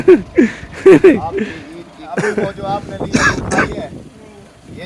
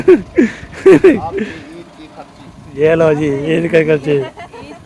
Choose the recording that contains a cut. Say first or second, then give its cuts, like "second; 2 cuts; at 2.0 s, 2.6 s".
first; 1 cut; at 2.0 s